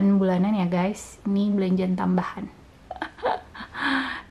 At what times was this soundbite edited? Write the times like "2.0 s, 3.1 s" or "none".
none